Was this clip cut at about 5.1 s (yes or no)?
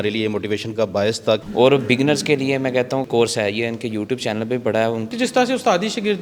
yes